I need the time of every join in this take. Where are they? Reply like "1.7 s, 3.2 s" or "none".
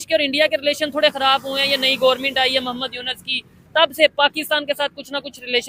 none